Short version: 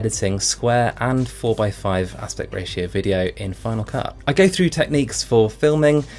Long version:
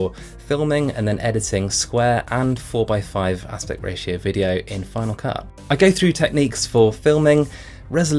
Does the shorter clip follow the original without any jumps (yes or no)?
no